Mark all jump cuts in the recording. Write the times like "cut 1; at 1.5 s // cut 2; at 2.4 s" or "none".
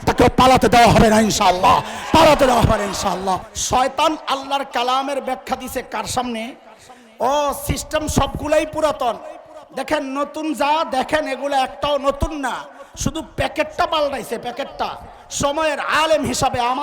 cut 1; at 3.5 s

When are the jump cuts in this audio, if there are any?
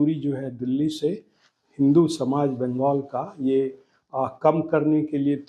none

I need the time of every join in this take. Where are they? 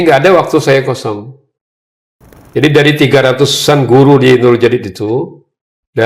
cut 1; at 2.3 s

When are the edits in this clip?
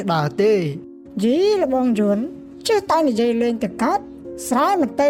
none

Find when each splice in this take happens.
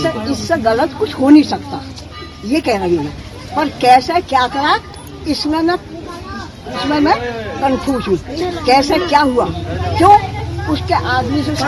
none

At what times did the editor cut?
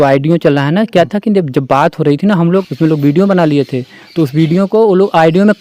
cut 1; at 2.6 s

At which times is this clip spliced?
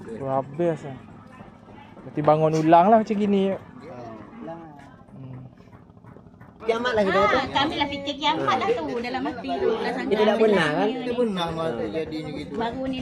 cut 1; at 6.6 s

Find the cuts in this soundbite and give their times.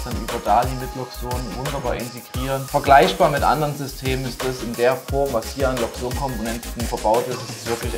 cut 1; at 2.6 s // cut 2; at 6.8 s

